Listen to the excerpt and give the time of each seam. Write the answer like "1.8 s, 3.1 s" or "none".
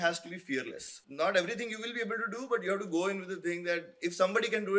0.9 s

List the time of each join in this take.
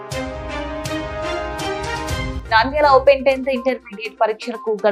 none

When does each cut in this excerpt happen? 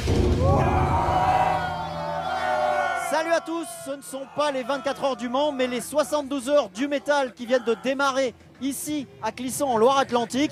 none

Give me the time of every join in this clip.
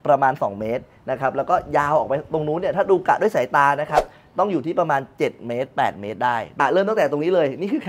6.5 s

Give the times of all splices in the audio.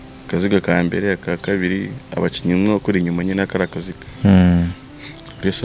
none

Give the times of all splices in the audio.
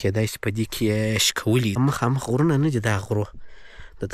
1.8 s

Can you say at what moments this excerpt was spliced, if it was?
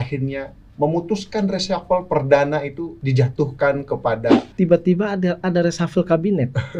2.9 s, 4.5 s

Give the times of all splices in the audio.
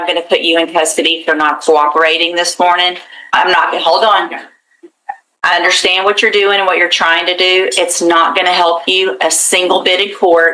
none

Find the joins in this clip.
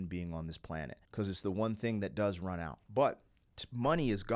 1.0 s, 2.8 s

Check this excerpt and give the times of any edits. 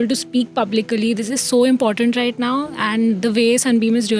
none

